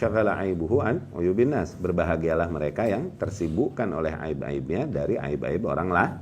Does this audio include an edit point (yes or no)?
no